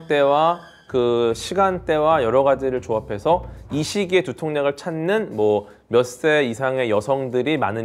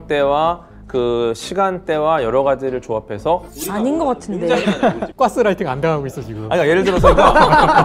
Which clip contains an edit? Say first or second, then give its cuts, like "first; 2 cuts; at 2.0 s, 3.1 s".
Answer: second; 2 cuts; at 3.5 s, 5.1 s